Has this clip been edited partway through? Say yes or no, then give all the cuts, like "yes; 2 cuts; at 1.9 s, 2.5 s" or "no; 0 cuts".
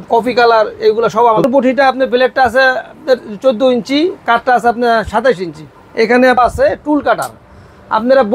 yes; 2 cuts; at 1.4 s, 6.4 s